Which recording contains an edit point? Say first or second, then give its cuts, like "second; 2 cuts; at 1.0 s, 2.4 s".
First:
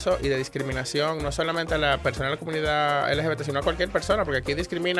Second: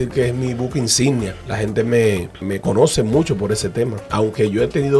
second; 3 cuts; at 1.4 s, 2.4 s, 4.0 s